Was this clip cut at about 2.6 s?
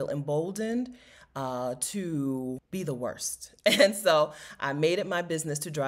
yes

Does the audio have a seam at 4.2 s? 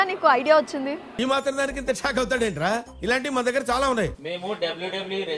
yes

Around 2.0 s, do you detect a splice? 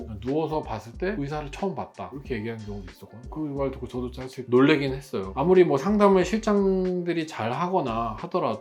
no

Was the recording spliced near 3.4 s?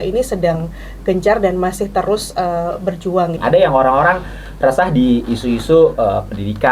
yes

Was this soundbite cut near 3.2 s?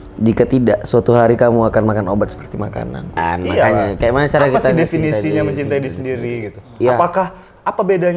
yes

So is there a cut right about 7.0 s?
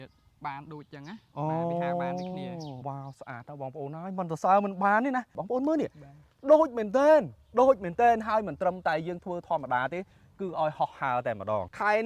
no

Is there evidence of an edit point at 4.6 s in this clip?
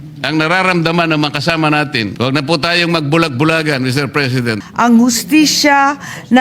yes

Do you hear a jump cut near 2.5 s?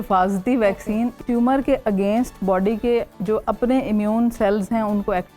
no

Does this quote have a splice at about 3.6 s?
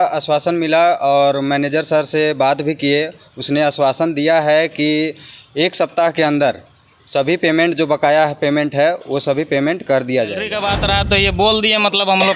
no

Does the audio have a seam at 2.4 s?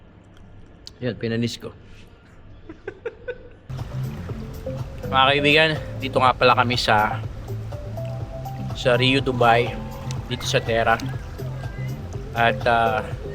no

